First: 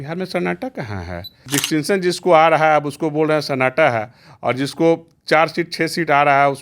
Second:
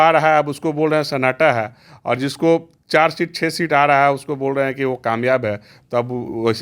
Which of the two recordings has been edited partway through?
first; 1 cut; at 1.4 s

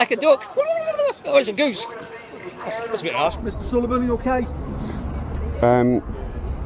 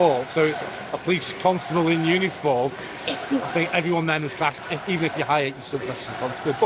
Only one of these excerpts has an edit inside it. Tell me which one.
first; 1 cut; at 3.4 s

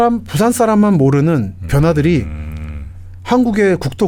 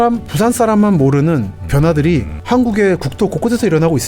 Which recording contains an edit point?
second; 1 cut; at 2.3 s

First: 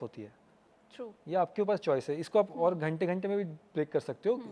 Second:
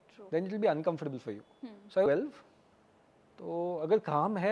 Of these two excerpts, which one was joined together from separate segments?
second; 1 cut; at 2.1 s

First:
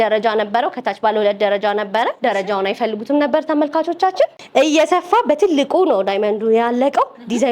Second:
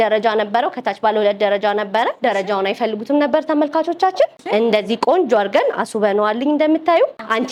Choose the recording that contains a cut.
first; 1 cut; at 4.4 s

